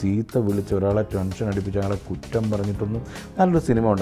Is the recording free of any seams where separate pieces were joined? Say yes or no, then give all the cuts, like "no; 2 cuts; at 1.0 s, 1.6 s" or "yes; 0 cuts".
yes; 0 cuts